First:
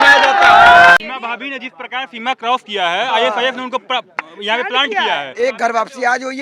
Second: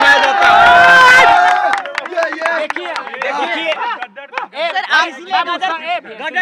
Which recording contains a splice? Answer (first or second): first